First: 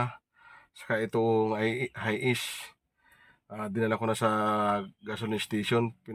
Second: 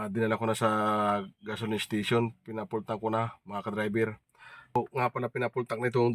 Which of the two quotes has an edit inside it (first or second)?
second